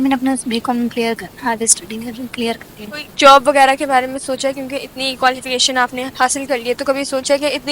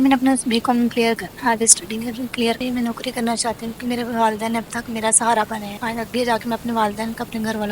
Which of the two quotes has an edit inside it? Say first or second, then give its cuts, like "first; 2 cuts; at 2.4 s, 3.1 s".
second; 1 cut; at 2.6 s